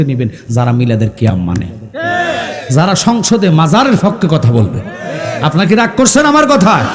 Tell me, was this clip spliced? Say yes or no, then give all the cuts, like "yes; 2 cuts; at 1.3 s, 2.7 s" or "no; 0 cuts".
no; 0 cuts